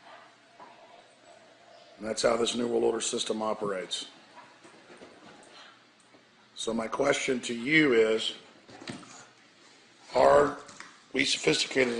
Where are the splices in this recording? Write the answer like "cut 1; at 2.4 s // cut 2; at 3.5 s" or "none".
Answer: none